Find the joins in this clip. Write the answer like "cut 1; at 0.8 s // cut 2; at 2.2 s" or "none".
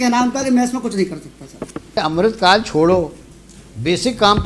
cut 1; at 2.0 s